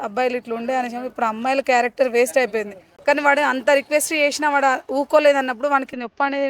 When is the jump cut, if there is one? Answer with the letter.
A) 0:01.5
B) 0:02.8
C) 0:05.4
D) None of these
B